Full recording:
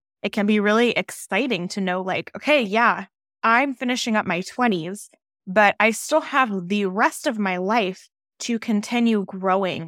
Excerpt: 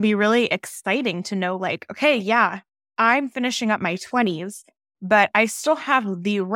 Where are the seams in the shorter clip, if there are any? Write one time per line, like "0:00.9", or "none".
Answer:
none